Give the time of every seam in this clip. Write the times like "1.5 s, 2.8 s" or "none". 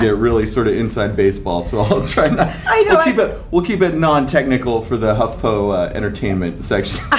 5.4 s